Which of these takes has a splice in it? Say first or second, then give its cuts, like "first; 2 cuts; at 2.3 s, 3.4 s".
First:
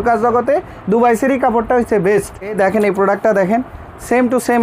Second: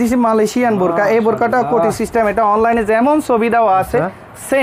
first; 1 cut; at 2.6 s